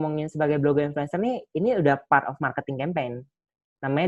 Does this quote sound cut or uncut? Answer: uncut